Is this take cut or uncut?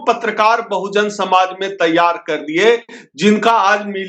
uncut